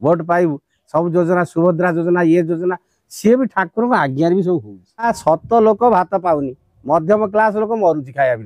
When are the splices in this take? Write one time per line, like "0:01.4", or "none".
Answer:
0:05.1